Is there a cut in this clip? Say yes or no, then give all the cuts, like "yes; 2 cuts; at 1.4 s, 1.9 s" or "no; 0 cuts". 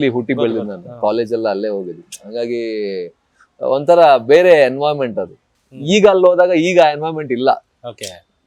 no; 0 cuts